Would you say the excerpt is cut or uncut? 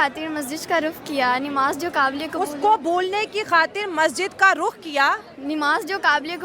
uncut